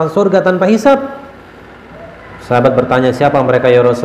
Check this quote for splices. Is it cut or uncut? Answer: uncut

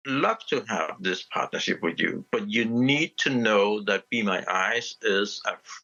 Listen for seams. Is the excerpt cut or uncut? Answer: uncut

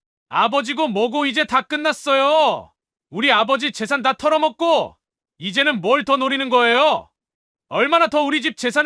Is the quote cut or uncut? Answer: uncut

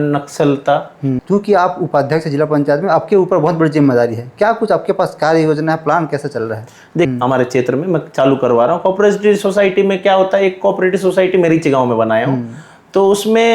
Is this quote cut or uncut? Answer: cut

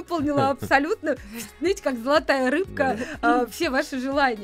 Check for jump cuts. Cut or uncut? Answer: uncut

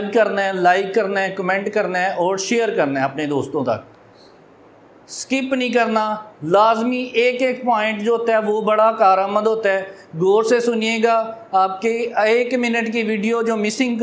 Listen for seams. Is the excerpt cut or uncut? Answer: uncut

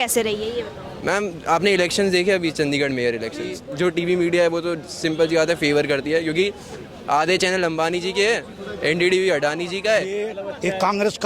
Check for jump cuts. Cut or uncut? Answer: cut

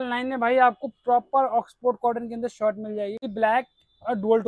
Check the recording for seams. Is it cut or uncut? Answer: cut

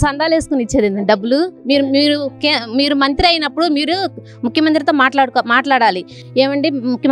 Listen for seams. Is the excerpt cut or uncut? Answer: uncut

